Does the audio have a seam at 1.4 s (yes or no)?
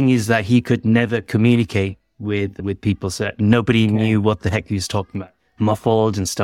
no